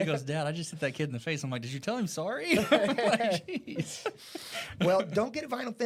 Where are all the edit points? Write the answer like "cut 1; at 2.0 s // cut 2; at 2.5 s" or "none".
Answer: none